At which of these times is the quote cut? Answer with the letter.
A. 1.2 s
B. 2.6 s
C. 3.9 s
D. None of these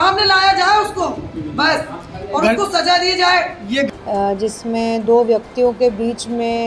C